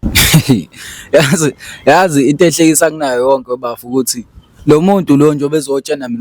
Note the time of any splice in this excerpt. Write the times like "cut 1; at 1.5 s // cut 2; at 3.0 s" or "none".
none